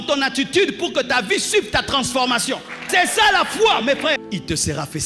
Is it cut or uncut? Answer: cut